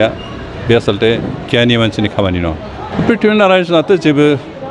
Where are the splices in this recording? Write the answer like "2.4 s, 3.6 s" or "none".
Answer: 2.7 s